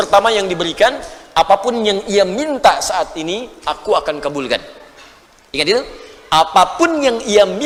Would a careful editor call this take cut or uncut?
uncut